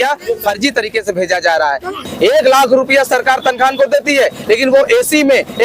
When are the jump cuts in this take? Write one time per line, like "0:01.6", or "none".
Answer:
0:02.1